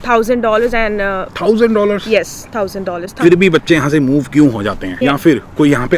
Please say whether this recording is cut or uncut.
cut